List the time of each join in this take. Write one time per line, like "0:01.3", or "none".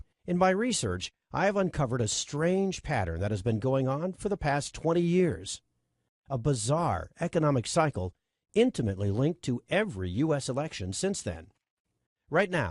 0:03.5